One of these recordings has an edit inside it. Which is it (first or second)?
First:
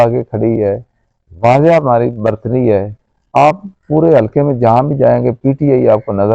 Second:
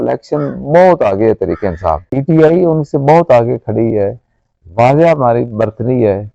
second